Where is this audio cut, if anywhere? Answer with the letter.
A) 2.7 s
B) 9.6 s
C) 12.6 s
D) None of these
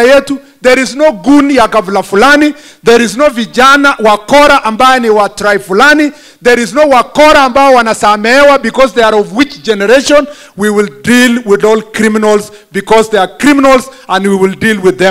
D